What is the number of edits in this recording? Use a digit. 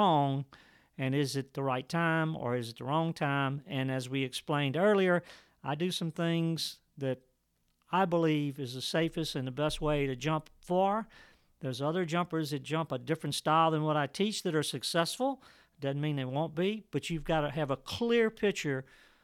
0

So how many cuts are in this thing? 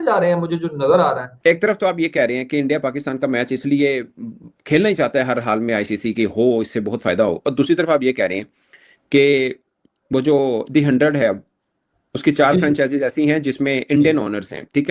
1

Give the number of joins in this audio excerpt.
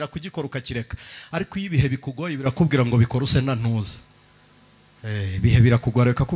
0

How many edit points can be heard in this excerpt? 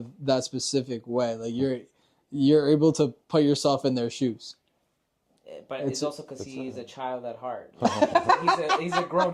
0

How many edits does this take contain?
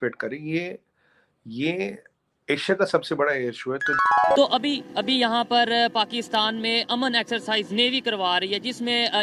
1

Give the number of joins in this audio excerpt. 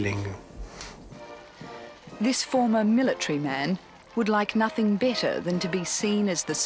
0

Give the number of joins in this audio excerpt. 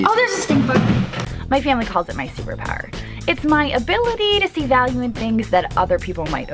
1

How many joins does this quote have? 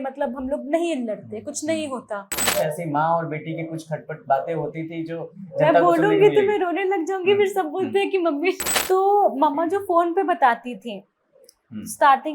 2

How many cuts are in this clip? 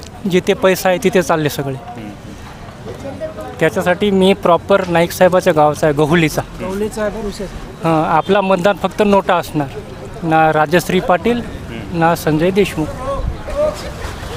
0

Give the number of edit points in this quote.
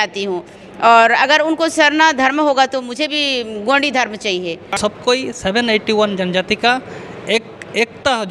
1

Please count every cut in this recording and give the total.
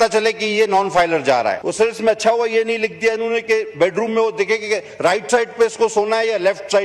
1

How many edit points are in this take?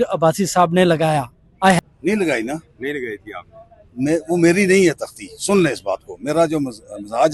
1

